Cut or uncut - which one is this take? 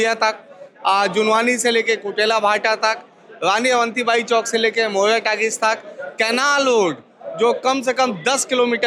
uncut